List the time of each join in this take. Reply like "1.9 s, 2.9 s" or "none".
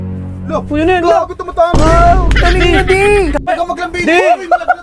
3.4 s